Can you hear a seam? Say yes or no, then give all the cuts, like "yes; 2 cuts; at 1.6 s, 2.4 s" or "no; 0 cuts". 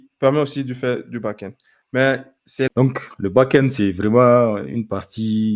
yes; 1 cut; at 2.7 s